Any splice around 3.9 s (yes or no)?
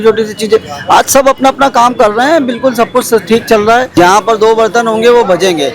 yes